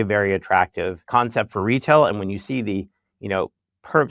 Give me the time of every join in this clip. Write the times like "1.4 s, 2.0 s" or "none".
1.0 s